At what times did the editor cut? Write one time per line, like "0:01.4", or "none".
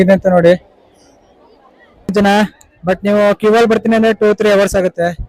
0:02.1